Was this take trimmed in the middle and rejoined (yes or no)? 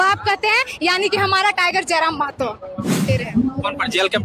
yes